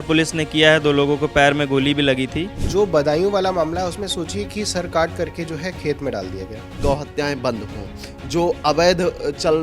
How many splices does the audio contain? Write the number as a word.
two